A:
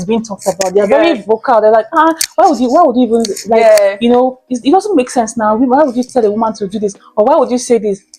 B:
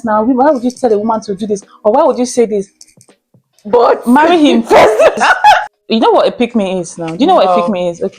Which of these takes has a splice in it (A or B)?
B